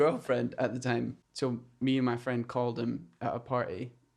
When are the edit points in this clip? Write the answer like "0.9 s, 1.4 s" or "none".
1.2 s